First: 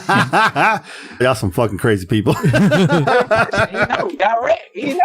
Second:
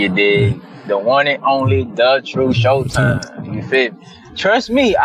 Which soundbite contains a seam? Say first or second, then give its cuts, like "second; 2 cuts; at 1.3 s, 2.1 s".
first; 1 cut; at 1.2 s